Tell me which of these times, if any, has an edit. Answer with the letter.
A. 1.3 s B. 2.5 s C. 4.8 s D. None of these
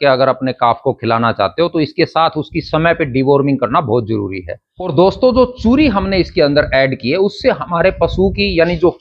C